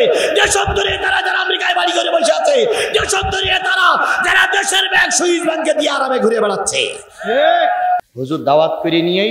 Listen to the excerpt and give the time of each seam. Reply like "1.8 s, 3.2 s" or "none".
8.0 s